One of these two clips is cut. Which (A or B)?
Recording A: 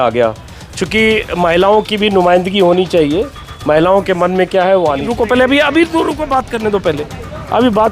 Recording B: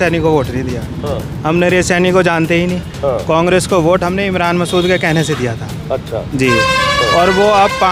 A